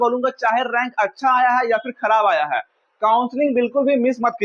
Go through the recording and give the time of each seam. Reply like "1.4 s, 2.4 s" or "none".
none